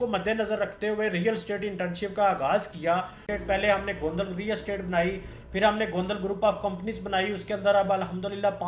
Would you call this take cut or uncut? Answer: cut